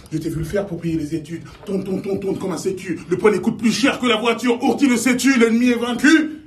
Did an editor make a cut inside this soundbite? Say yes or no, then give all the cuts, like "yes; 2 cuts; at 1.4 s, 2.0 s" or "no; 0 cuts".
yes; 1 cut; at 1.0 s